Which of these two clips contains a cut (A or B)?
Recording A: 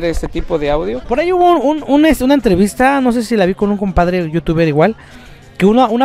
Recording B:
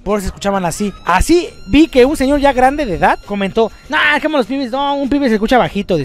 A